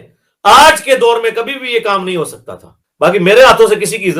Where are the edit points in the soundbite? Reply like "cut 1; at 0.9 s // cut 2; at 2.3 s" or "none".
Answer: cut 1; at 2.8 s